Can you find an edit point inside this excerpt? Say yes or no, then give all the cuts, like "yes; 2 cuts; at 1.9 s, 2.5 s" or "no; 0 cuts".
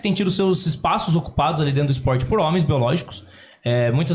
no; 0 cuts